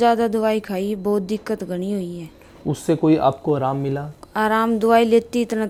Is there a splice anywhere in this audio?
no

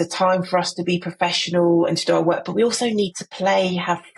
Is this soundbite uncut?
yes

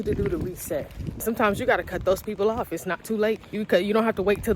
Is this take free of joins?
no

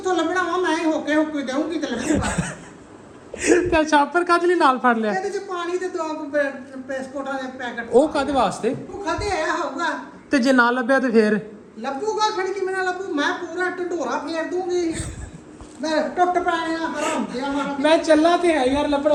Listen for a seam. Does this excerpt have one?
no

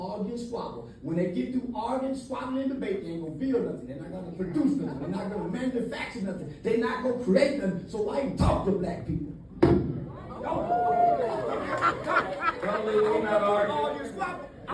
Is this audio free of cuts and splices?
yes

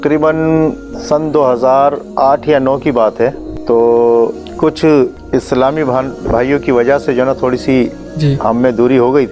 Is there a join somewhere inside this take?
yes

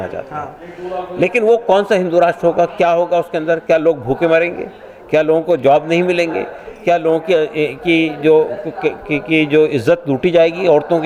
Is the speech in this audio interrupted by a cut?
no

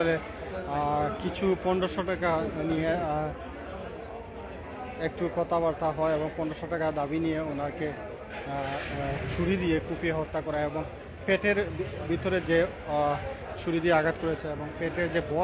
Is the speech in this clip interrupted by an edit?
no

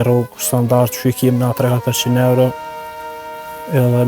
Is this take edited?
no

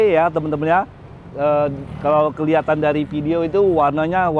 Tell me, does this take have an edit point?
no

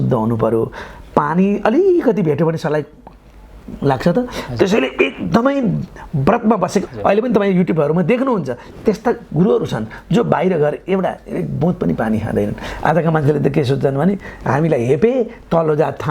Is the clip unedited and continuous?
no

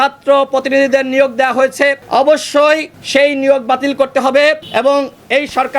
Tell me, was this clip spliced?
yes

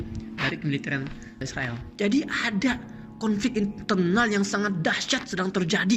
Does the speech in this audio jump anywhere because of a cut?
no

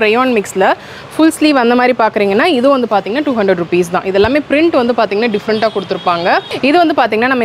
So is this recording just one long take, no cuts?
no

